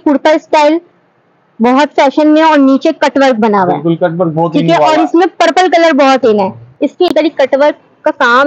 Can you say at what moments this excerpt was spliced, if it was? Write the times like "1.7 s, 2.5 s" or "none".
7.1 s